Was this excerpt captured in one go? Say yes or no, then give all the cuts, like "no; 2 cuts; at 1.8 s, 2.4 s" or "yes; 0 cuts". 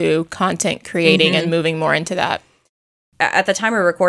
no; 1 cut; at 2.8 s